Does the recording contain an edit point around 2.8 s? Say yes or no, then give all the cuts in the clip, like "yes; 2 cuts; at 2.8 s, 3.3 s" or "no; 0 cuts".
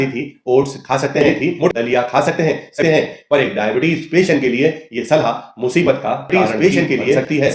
yes; 3 cuts; at 1.7 s, 2.8 s, 6.3 s